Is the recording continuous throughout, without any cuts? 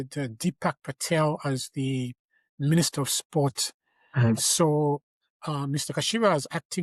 yes; 0 cuts

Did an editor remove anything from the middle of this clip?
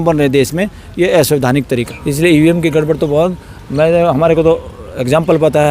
yes; 1 cut; at 1.9 s

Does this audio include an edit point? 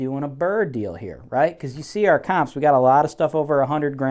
no; 0 cuts

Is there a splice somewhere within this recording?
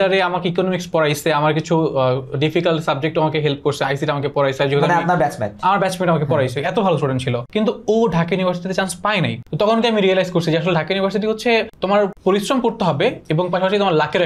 no; 0 cuts

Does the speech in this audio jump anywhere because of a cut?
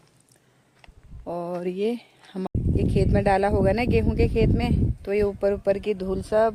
yes; 1 cut; at 2.5 s

